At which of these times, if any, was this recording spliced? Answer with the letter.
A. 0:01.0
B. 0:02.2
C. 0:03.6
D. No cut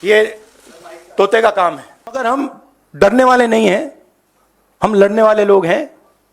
B